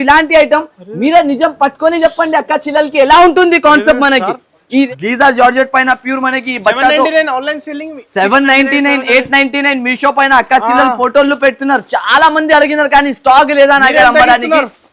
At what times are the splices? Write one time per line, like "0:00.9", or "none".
0:04.9